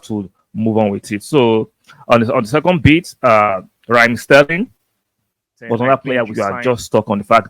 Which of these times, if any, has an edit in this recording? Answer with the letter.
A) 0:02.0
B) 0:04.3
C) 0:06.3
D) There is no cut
C